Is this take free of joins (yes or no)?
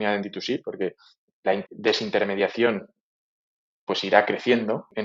yes